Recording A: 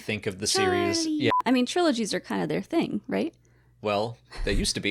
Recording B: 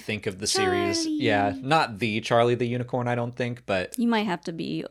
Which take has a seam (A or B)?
A